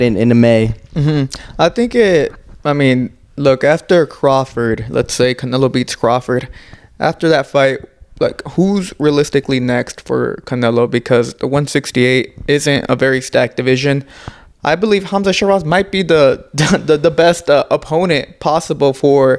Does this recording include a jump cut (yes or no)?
no